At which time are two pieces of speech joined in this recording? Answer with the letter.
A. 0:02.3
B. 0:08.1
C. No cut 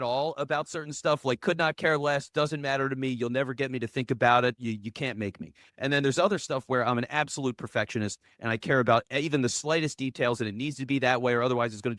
C